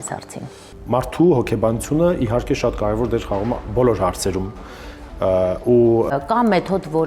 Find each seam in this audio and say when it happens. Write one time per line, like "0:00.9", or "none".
0:06.1